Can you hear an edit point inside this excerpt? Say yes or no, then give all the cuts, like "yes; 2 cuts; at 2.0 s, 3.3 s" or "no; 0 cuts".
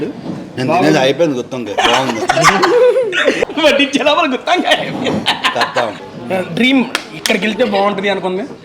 yes; 2 cuts; at 3.4 s, 6.1 s